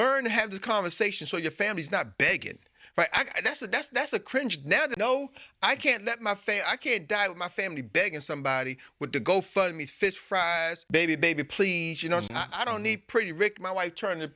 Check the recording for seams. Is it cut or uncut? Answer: cut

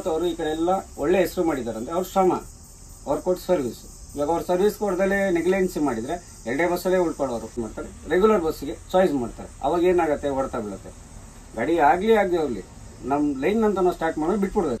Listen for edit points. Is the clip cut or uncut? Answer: cut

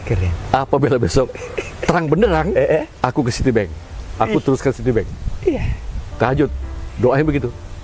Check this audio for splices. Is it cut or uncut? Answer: uncut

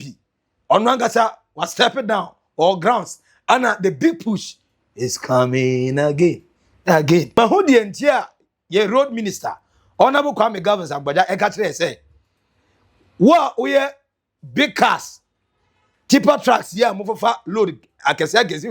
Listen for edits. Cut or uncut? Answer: cut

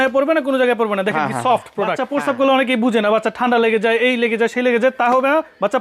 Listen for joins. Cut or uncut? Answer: cut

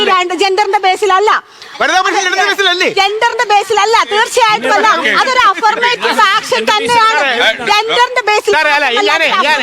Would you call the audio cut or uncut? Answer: cut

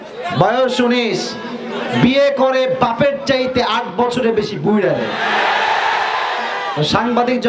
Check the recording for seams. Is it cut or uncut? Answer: uncut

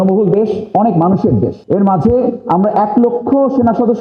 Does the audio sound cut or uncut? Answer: cut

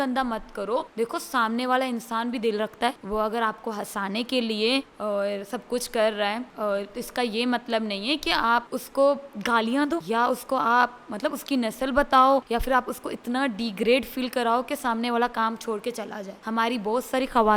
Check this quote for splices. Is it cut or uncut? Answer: cut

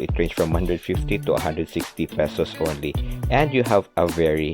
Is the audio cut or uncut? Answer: uncut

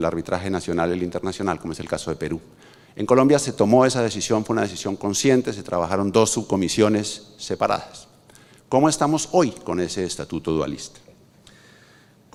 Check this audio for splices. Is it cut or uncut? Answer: uncut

